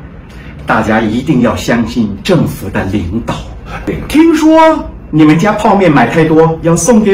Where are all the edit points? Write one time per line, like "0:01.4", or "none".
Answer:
0:03.8